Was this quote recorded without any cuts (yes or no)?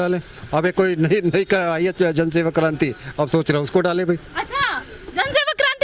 yes